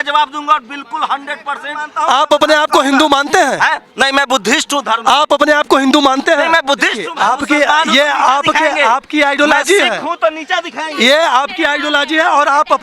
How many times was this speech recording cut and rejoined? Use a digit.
2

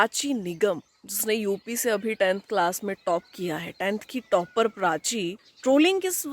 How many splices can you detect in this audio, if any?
1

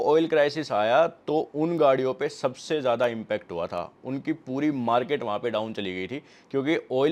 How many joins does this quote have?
0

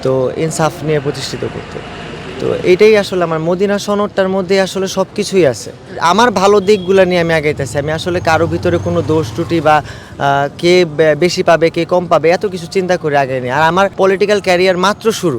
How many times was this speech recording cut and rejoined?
2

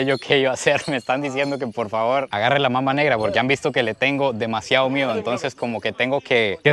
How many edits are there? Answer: 0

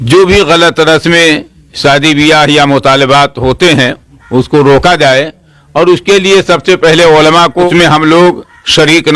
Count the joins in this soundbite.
1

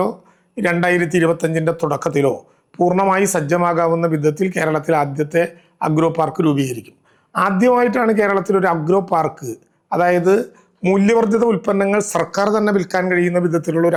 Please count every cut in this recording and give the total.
0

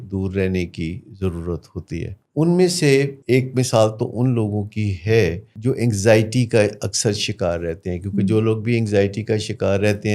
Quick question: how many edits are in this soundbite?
3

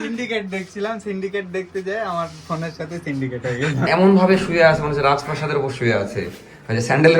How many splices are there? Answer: 1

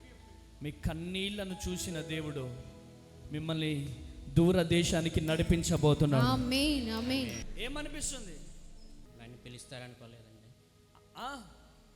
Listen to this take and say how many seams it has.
2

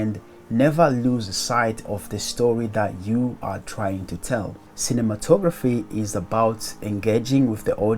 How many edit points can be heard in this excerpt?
1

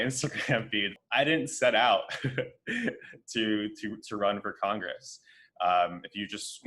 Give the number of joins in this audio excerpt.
1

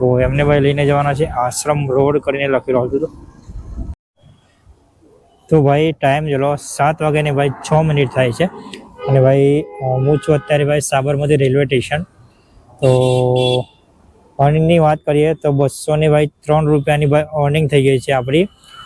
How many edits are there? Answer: 1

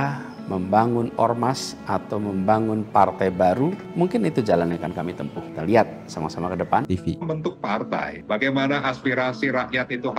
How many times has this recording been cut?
1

